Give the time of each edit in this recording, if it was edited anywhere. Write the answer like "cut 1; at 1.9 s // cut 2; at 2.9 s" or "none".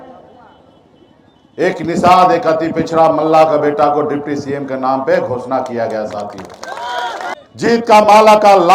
cut 1; at 7.3 s